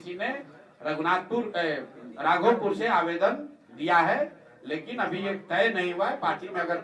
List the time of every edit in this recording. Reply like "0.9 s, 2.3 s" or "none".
none